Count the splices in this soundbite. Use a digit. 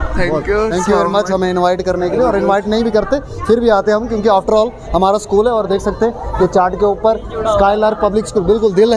0